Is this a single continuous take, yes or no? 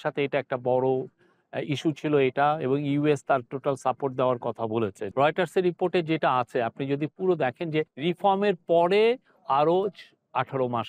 no